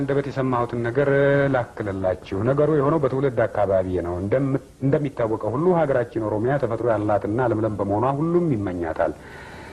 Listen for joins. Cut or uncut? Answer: uncut